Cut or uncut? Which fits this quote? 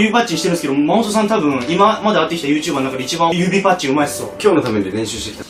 uncut